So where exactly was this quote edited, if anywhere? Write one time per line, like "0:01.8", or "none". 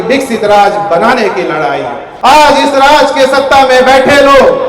0:02.0